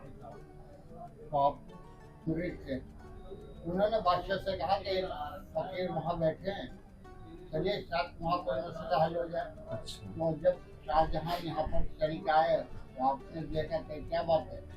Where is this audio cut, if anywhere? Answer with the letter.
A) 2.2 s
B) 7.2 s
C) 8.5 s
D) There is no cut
A